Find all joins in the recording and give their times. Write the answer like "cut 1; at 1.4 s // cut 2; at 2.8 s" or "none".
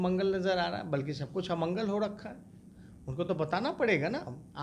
none